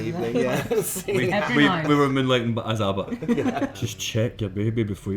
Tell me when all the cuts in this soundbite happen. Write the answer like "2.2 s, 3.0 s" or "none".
3.8 s

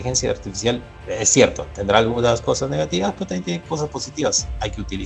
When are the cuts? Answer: 0.9 s

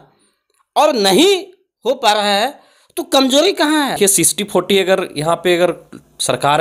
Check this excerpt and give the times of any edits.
4.0 s

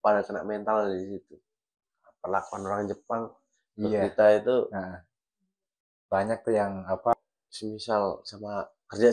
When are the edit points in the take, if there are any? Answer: 7.1 s

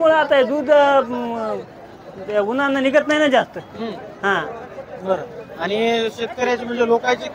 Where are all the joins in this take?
none

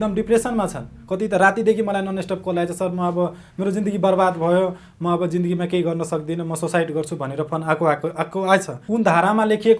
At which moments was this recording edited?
8.8 s

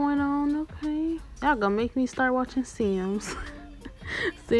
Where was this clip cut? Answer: 1.3 s

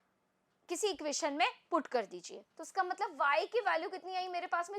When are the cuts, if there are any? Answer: 2.5 s

